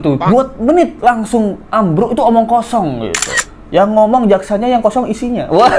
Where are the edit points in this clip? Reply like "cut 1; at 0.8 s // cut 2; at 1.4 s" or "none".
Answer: none